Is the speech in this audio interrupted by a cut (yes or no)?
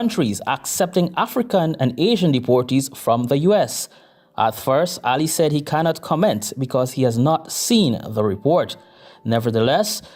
no